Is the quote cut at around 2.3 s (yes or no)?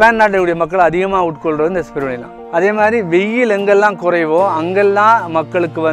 yes